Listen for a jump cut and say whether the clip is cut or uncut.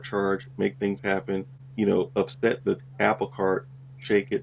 cut